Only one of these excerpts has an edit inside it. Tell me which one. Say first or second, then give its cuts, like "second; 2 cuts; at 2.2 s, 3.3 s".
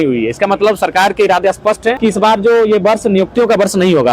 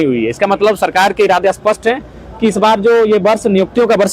first; 1 cut; at 2.0 s